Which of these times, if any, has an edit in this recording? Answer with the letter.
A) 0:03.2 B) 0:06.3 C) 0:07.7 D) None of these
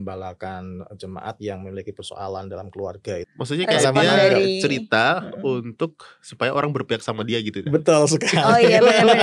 A